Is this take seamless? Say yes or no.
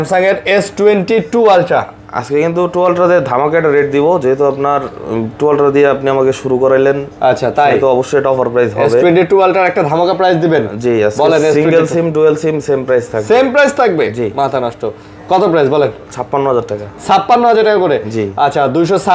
yes